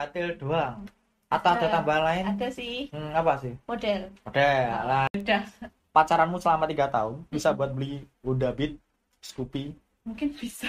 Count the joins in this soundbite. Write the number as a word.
one